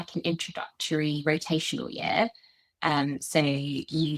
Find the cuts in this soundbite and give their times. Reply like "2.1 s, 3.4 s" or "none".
none